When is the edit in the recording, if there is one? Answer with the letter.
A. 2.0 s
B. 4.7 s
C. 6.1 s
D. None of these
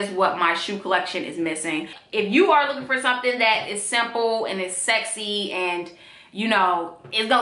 A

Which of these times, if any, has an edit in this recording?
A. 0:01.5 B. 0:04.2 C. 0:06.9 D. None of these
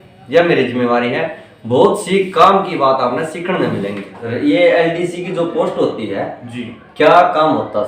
B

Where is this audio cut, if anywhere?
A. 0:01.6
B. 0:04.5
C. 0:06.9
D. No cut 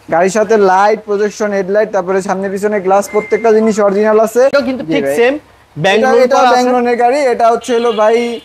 B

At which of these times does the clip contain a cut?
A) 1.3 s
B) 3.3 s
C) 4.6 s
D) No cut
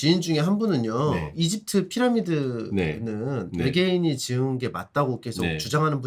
A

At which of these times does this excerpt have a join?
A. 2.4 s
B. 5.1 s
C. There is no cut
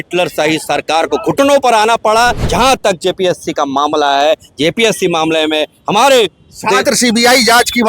A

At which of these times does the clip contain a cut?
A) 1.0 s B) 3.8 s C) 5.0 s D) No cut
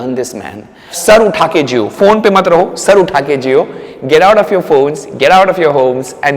A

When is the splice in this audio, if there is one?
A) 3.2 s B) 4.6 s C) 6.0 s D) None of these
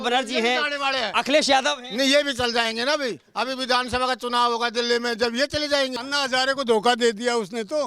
C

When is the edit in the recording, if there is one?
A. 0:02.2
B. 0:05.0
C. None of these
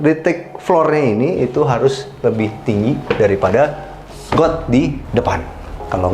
B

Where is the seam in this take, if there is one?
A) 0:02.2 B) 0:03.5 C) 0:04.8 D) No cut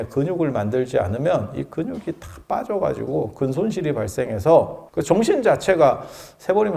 C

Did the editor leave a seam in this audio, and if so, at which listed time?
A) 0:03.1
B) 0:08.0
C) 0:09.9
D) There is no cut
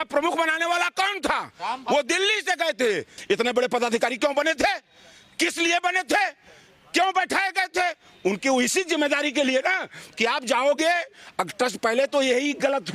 A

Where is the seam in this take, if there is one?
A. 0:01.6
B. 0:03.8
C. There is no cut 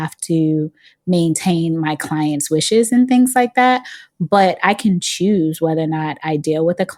C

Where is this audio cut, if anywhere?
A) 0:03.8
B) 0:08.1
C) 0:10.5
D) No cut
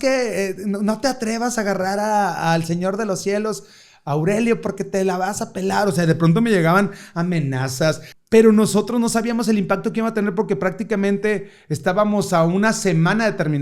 B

